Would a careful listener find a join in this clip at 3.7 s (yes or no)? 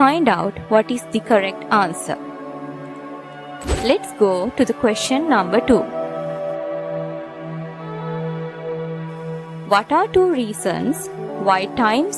yes